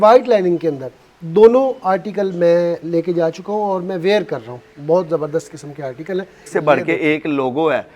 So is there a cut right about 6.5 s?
yes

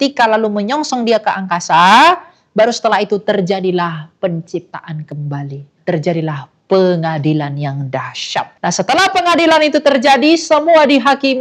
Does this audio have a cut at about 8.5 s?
yes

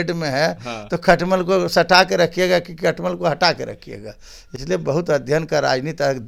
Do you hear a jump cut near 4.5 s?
no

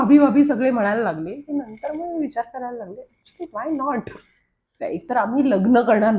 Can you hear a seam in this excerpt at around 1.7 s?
no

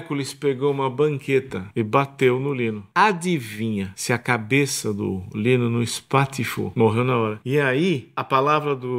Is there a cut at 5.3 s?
no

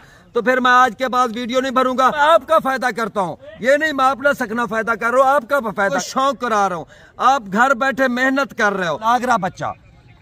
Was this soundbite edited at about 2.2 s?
yes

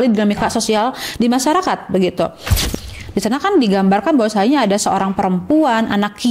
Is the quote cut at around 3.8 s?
no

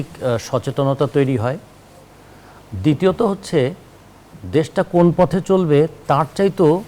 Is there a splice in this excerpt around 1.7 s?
no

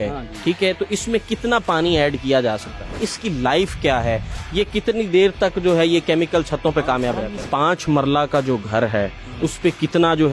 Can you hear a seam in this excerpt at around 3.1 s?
yes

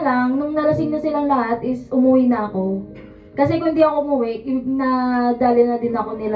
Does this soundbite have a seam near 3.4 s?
no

